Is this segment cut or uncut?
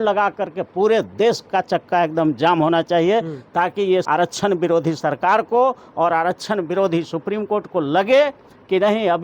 cut